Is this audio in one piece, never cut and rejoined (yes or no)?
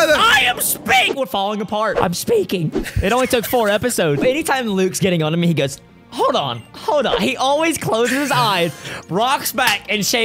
no